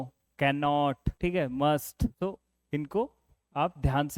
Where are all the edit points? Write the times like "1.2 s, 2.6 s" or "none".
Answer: 1.1 s, 2.1 s